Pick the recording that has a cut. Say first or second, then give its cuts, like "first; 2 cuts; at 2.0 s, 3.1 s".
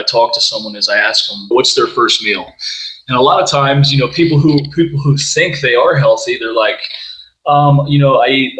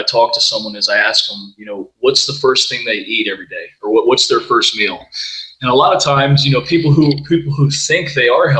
first; 1 cut; at 1.5 s